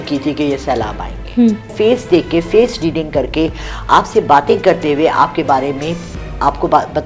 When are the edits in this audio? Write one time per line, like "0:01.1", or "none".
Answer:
0:01.7